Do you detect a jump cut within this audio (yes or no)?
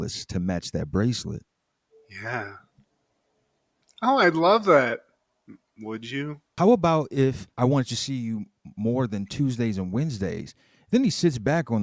yes